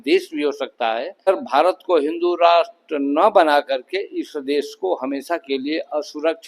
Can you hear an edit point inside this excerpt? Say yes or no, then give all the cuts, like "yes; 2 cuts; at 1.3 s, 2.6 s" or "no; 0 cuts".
yes; 1 cut; at 1.3 s